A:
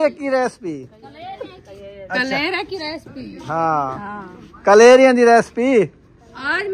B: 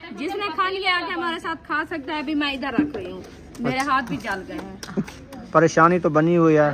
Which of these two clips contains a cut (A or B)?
B